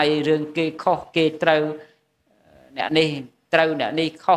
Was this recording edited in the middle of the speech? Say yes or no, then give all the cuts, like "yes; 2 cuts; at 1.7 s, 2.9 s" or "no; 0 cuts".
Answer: no; 0 cuts